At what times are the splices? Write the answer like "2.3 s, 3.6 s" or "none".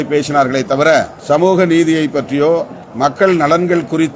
1.1 s, 2.8 s